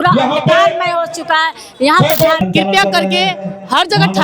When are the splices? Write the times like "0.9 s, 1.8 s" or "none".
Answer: 2.4 s